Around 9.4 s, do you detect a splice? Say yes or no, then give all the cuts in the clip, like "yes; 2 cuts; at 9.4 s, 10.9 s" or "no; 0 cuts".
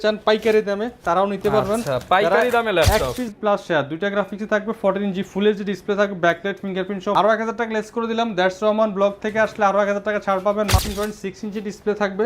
no; 3 cuts; at 3.3 s, 7.1 s, 10.7 s